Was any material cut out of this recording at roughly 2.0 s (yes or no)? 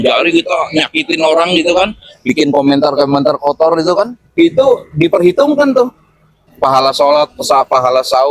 no